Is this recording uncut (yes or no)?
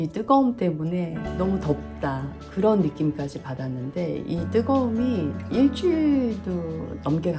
yes